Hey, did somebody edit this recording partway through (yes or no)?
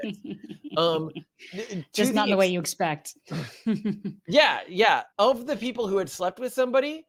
no